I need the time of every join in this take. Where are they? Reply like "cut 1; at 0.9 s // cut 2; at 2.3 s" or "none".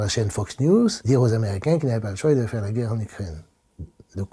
cut 1; at 1.0 s